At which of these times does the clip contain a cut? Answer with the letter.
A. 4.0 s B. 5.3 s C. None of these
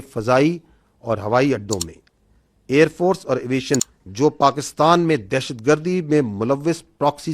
A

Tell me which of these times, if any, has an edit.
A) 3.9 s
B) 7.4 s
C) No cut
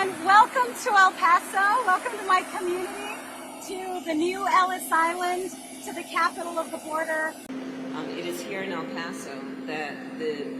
B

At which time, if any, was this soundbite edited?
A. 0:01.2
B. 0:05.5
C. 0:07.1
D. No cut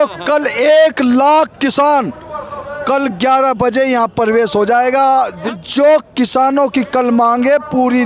B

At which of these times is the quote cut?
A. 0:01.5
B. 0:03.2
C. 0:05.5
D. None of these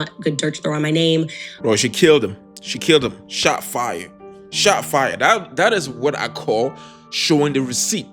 A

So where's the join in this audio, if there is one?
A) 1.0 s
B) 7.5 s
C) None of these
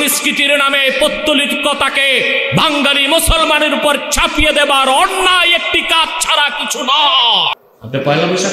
B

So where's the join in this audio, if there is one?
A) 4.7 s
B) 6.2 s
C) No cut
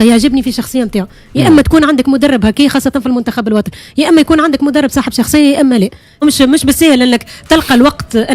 B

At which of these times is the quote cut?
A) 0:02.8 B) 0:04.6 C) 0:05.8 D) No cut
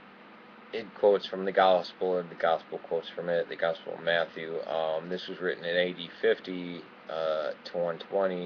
A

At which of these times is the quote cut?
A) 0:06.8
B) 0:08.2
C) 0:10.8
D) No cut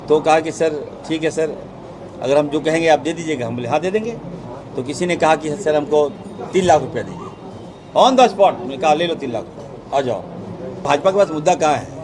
C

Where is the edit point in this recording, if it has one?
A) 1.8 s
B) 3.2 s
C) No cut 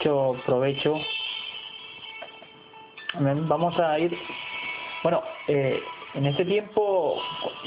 B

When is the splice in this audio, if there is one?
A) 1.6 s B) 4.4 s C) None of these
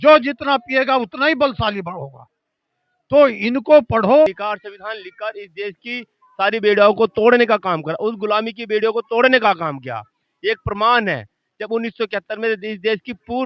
B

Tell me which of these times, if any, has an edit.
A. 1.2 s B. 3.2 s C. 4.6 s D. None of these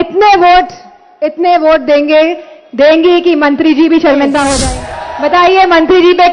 C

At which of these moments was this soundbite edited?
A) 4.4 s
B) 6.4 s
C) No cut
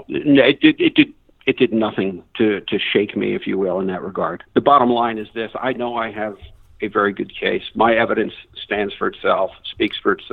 A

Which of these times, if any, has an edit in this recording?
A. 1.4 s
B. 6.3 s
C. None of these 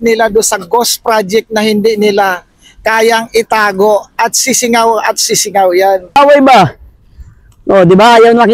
B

